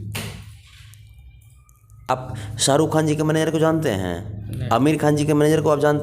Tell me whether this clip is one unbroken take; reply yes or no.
no